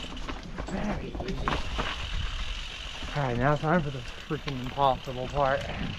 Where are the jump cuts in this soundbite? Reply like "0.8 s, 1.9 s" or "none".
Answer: none